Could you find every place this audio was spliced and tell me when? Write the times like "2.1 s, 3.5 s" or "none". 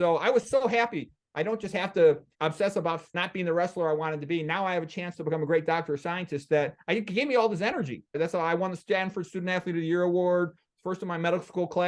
3.2 s, 8.2 s